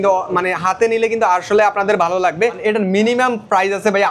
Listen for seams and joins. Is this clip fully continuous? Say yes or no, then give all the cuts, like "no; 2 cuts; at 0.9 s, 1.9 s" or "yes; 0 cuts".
no; 1 cut; at 2.6 s